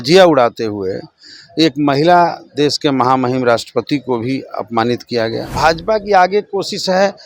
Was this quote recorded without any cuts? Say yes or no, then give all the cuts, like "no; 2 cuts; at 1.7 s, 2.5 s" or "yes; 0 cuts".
no; 1 cut; at 5.4 s